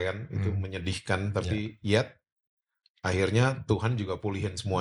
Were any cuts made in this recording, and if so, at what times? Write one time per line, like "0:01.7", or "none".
none